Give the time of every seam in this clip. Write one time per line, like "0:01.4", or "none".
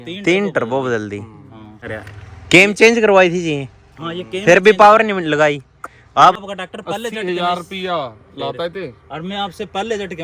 0:01.9
0:06.4